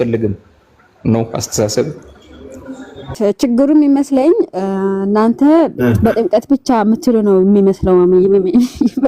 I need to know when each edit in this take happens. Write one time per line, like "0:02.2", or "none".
0:03.1